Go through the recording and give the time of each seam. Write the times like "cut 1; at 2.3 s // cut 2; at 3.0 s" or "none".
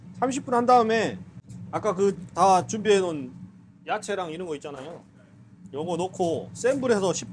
none